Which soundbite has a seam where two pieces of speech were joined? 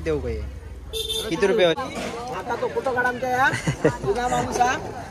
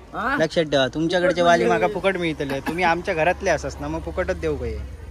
first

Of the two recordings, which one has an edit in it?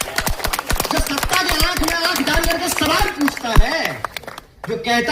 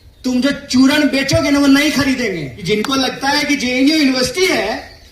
second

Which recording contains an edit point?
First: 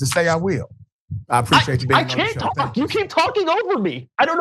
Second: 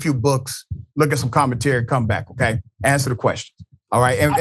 second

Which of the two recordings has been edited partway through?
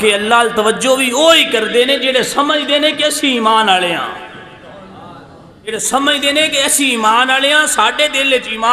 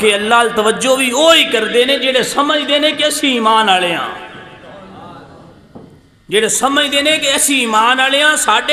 first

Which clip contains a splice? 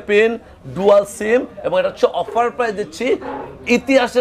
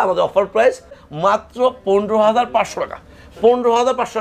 second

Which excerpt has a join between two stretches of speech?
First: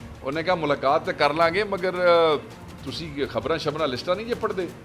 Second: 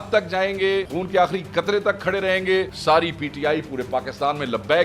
second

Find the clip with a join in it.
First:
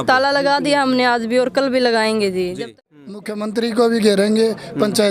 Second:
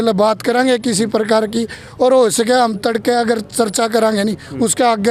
first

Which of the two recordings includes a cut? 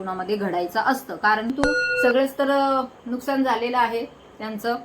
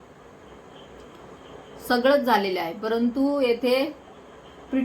first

